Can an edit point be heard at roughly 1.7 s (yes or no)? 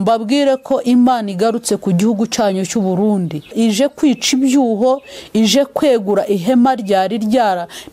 no